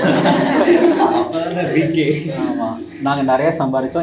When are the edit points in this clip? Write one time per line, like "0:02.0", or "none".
none